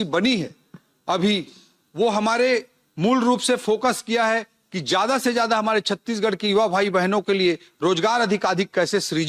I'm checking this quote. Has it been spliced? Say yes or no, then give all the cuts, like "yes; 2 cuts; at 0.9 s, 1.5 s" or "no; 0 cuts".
no; 0 cuts